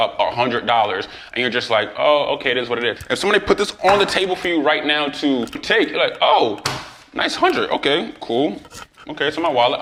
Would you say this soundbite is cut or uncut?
uncut